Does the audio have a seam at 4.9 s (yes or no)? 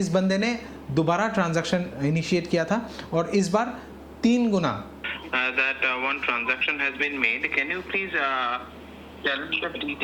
yes